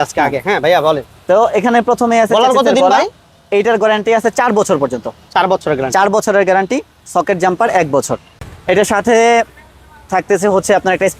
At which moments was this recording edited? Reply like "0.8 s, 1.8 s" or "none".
8.5 s